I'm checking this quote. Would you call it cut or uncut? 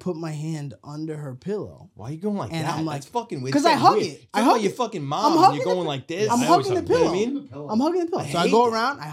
uncut